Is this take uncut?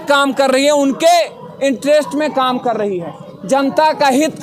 yes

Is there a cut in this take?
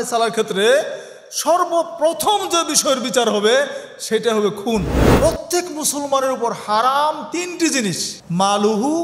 yes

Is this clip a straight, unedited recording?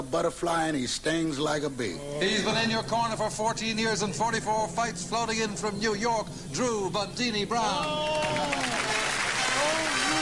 no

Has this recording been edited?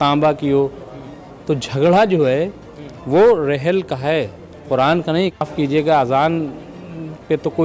yes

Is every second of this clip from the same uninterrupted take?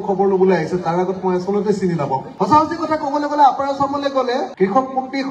no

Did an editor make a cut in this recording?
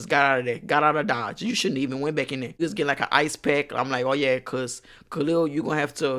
yes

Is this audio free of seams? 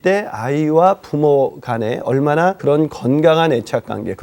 no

